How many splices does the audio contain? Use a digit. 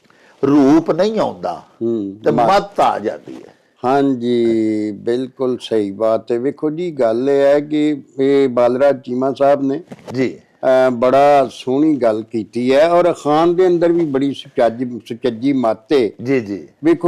0